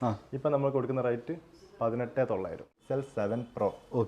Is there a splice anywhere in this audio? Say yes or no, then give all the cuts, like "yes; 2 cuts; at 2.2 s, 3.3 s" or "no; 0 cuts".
yes; 1 cut; at 2.7 s